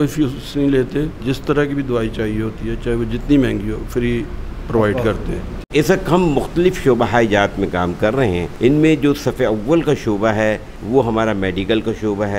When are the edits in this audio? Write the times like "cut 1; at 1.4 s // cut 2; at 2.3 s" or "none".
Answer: cut 1; at 1.3 s // cut 2; at 5.5 s // cut 3; at 8.5 s // cut 4; at 10.7 s